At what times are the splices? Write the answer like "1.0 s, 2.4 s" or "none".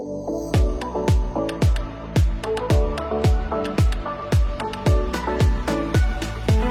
none